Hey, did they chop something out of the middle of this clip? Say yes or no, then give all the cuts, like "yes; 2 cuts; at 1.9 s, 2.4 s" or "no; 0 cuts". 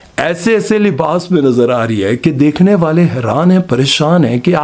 no; 0 cuts